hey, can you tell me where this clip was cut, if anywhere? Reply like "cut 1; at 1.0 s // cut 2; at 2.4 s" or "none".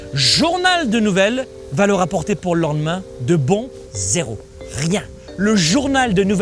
cut 1; at 1.6 s // cut 2; at 3.7 s // cut 3; at 5.2 s